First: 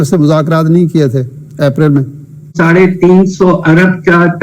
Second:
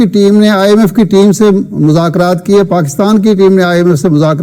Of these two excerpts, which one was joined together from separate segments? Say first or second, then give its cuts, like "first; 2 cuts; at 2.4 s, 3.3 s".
first; 1 cut; at 2.5 s